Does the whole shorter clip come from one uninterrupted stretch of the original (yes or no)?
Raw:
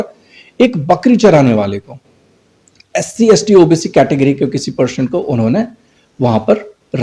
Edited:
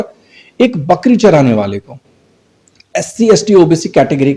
yes